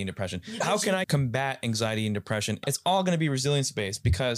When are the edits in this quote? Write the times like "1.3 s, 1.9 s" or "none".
1.1 s, 2.6 s

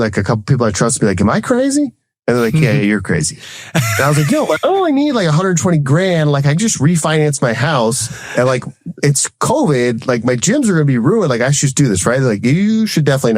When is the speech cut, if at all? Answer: none

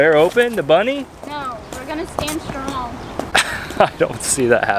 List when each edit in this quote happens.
none

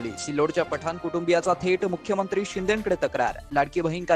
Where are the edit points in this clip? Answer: none

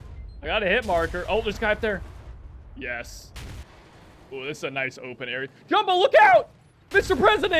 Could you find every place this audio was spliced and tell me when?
3.7 s

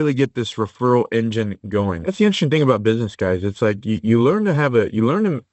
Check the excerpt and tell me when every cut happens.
2.0 s

